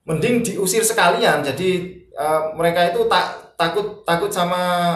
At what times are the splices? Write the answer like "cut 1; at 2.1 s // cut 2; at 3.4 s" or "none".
none